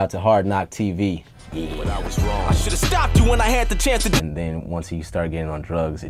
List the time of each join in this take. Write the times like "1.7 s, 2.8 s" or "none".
none